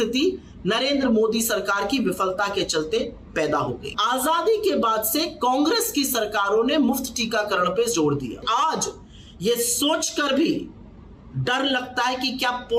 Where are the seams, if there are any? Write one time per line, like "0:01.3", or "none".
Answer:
0:03.9
0:08.4